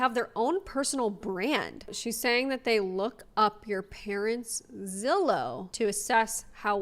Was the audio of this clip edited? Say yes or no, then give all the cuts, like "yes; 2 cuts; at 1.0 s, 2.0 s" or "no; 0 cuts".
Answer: yes; 2 cuts; at 1.8 s, 5.6 s